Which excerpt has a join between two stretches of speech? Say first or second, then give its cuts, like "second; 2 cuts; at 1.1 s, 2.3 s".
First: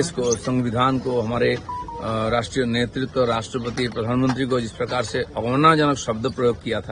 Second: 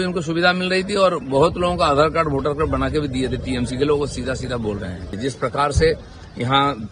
second; 1 cut; at 5.1 s